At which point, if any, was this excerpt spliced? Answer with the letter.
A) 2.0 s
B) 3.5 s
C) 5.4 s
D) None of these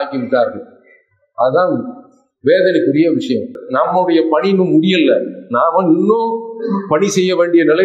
B